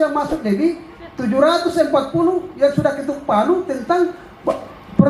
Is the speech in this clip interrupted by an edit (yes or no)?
no